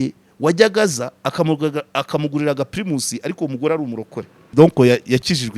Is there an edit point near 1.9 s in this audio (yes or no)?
no